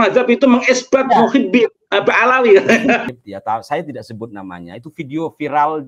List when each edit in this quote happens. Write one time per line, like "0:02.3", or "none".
0:03.0